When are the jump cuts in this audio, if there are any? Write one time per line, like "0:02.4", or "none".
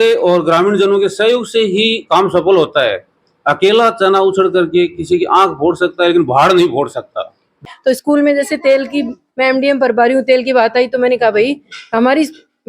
0:07.7